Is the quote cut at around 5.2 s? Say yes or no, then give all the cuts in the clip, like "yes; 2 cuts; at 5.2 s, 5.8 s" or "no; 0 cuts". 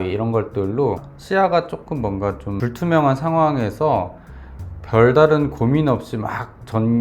no; 2 cuts; at 1.0 s, 2.6 s